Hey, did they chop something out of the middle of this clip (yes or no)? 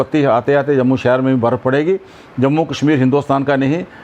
no